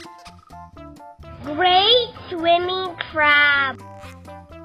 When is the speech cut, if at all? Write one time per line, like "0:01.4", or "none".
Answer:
0:01.4
0:03.8